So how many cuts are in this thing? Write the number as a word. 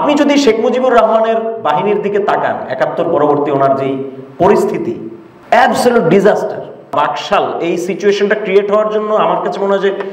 one